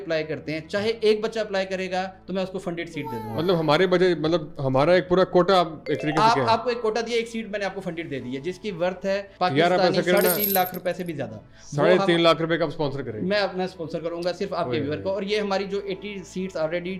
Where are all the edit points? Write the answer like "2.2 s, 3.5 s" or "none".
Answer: none